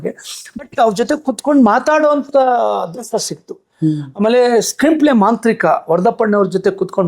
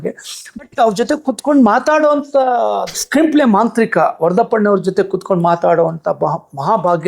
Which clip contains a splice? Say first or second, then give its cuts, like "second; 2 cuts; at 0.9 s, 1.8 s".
second; 1 cut; at 3.0 s